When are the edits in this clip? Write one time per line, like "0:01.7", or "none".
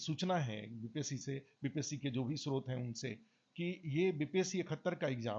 none